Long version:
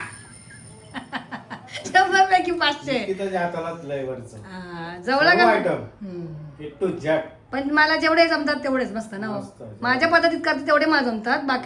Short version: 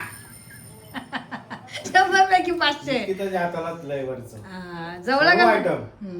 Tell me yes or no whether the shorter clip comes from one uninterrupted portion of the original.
yes